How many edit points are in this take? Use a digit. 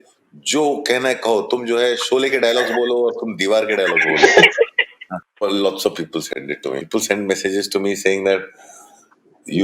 1